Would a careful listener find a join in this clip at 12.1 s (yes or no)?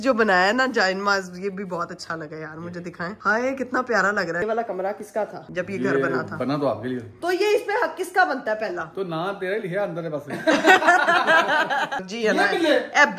yes